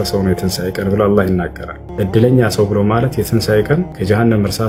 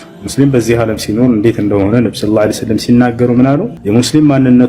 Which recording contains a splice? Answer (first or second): second